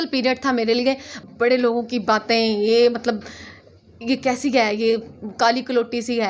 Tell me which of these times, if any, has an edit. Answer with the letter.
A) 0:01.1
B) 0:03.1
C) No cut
A